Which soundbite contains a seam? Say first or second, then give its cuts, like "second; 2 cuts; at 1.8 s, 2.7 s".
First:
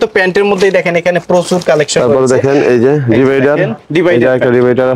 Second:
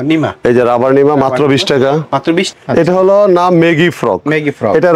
second; 1 cut; at 2.6 s